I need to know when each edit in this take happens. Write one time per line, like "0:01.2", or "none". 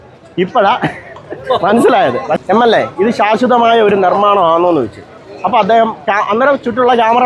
0:02.3